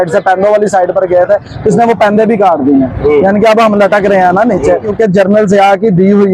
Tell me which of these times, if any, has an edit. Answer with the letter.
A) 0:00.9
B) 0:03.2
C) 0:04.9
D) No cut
C